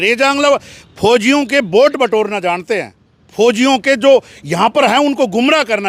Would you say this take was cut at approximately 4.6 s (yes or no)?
no